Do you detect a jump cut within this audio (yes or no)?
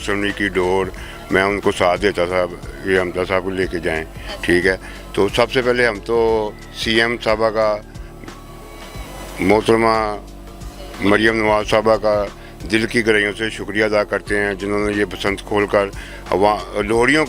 no